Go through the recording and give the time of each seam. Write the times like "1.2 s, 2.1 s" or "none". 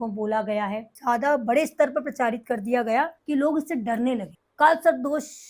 0.9 s, 3.2 s, 4.4 s